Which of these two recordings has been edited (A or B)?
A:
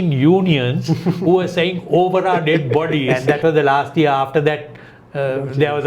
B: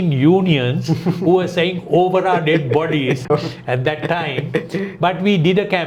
A